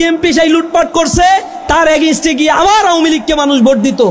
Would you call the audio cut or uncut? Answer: uncut